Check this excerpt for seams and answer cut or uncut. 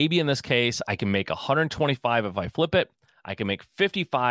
uncut